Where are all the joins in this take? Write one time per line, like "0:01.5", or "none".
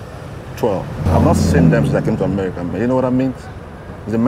0:01.0